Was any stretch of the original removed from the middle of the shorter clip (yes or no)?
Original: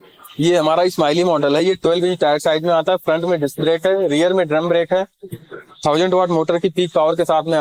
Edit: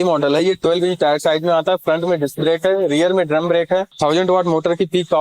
yes